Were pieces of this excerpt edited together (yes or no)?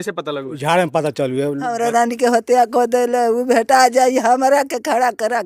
yes